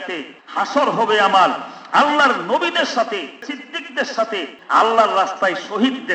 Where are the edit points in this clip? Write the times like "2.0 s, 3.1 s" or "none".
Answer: 3.5 s, 4.6 s